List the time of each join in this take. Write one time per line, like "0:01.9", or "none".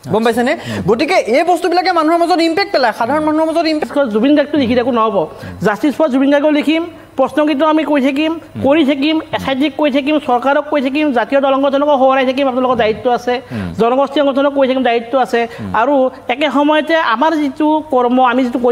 0:03.8